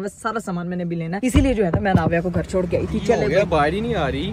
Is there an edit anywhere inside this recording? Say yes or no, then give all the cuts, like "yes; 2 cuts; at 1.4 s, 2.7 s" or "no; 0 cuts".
no; 0 cuts